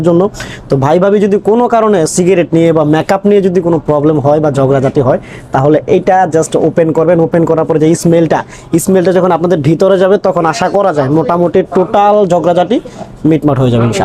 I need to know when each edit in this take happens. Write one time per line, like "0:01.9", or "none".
none